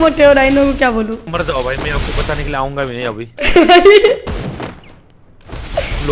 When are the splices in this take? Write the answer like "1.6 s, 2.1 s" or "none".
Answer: 1.2 s